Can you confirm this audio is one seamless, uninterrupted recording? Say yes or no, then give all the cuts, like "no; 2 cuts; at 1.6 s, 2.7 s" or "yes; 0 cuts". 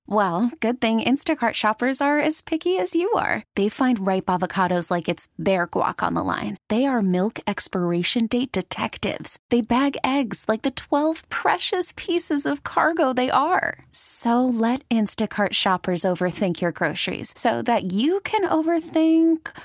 yes; 0 cuts